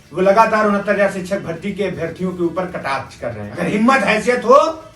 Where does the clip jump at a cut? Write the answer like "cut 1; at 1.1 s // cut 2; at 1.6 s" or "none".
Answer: cut 1; at 3.5 s